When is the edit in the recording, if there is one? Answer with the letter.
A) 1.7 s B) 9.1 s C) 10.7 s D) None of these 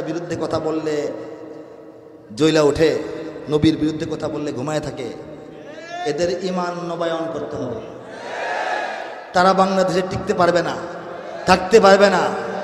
B